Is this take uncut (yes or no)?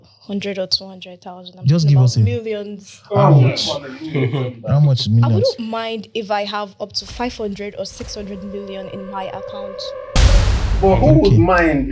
yes